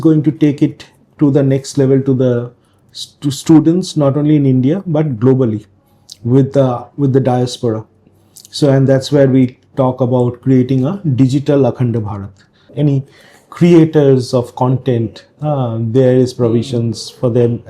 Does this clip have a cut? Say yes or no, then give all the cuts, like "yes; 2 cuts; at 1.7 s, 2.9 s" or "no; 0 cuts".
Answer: yes; 1 cut; at 12.7 s